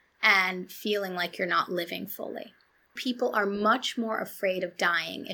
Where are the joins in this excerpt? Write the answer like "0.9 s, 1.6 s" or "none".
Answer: 3.0 s

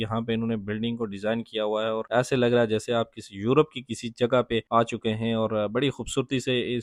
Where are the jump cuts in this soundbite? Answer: none

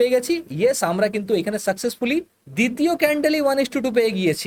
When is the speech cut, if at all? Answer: none

